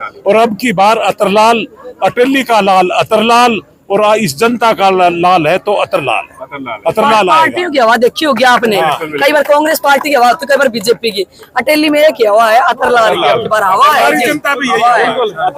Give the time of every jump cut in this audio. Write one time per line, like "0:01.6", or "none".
none